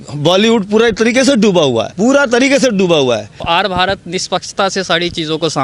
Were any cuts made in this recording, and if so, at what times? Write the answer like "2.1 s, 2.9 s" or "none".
1.9 s, 3.4 s